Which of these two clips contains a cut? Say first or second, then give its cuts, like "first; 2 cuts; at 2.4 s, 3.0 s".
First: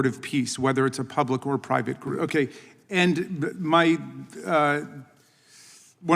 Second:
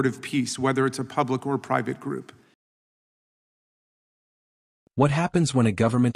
first; 1 cut; at 2.1 s